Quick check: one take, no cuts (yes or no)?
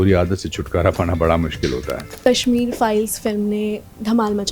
no